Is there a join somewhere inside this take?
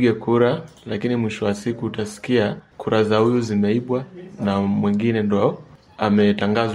yes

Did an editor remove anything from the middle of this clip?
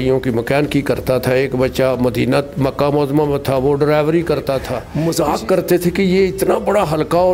yes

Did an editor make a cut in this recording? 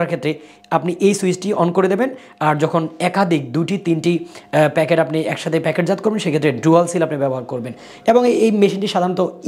no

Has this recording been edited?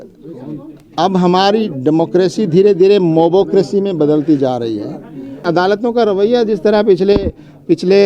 yes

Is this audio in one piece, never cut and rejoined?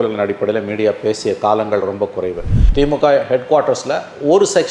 no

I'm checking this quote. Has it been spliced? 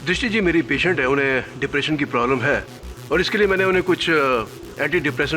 no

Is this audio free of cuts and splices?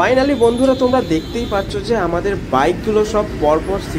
yes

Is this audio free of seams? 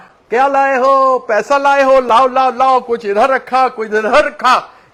yes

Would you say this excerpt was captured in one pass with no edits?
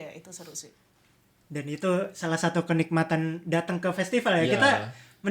yes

